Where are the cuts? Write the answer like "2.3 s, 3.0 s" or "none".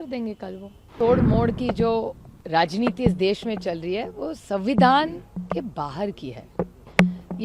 0.9 s